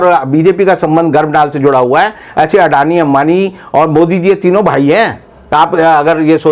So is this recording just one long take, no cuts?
yes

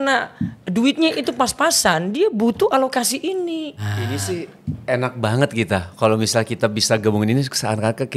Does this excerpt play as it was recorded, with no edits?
no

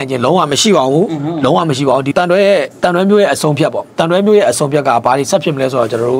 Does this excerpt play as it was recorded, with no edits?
no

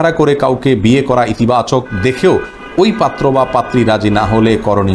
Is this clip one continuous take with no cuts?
yes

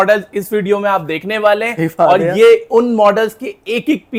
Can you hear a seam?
no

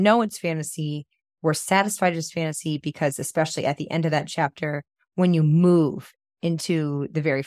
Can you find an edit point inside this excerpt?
no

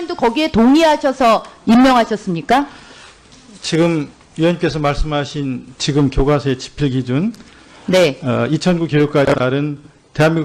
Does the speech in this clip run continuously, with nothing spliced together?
yes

